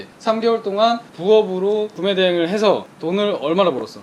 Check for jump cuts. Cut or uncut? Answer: cut